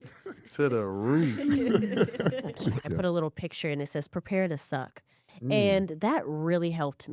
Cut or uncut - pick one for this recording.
cut